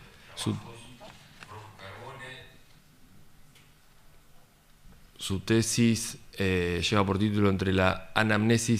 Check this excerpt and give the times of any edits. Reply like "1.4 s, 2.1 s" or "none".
5.2 s